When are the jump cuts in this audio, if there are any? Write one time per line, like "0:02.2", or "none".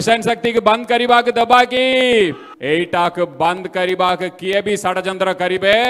0:02.5

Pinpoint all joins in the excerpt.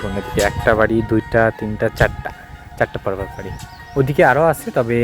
none

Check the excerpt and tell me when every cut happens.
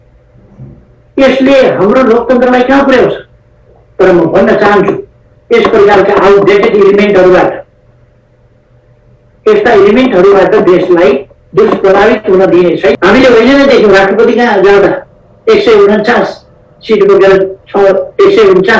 0:13.0

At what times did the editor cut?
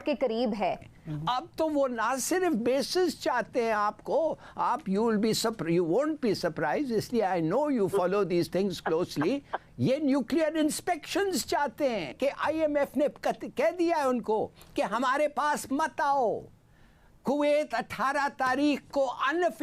0:00.8
0:12.1

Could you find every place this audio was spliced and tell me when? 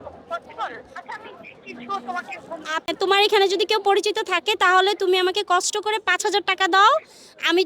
0:02.9

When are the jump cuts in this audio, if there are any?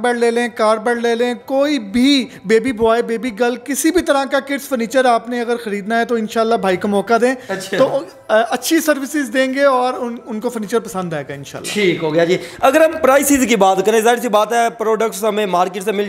none

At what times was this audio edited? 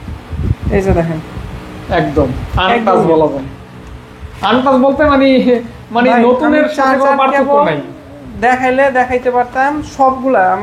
none

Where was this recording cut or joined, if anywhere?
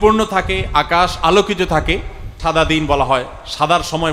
0:02.3

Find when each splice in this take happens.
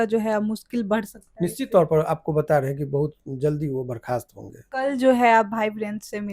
0:04.7

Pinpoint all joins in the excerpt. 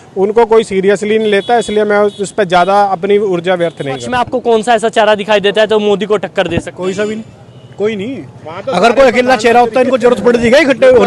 0:04.0

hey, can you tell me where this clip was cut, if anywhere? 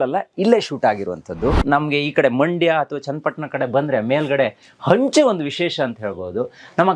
0:01.6

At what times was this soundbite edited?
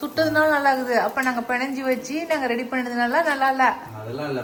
none

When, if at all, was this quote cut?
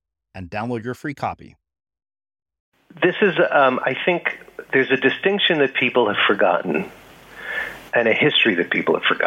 0:03.0

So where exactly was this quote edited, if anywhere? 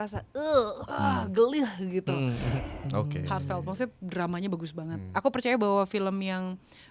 0:02.6

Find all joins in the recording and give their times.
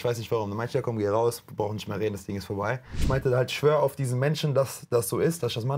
0:03.0

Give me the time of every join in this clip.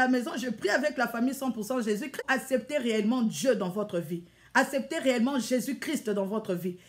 0:02.1

